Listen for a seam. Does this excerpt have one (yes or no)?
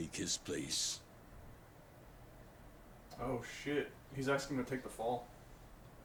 no